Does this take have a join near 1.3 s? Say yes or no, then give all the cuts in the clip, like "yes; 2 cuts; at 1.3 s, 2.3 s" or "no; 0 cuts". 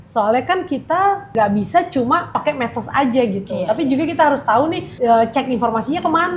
yes; 3 cuts; at 1.3 s, 2.5 s, 4.9 s